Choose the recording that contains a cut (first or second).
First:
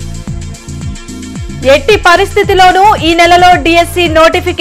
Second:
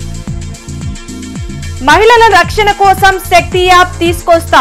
second